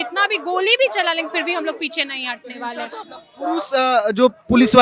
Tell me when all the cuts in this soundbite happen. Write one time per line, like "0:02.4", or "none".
0:03.0